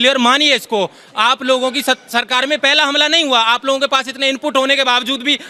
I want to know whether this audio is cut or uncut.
uncut